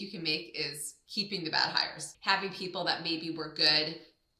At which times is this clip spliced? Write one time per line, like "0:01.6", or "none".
0:02.1